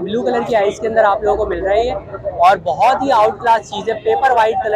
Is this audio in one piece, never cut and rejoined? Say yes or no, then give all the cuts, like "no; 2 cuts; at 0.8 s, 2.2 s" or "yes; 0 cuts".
yes; 0 cuts